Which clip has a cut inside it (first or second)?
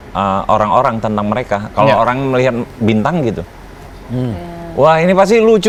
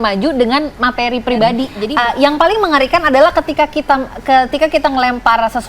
second